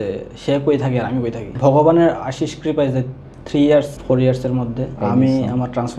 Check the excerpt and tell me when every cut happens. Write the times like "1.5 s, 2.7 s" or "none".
1.5 s, 4.0 s, 5.0 s